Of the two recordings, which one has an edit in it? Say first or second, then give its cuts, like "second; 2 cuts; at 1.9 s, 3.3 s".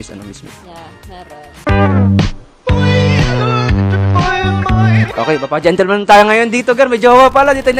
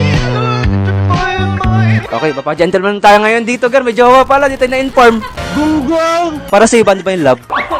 second; 1 cut; at 6.4 s